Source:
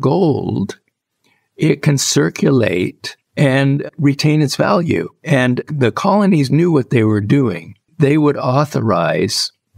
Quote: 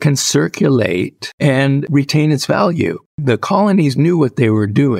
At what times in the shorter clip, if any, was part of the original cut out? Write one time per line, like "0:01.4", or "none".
0:01.6
0:03.1